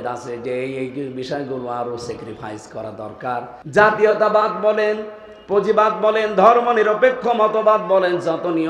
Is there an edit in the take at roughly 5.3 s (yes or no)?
no